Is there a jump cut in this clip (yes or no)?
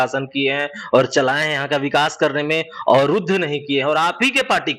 no